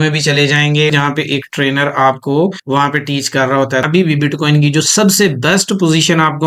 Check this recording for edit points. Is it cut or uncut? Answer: cut